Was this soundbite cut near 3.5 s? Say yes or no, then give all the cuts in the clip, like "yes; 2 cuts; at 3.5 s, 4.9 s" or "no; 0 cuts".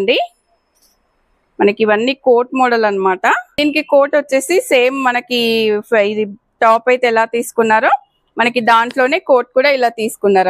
yes; 1 cut; at 3.5 s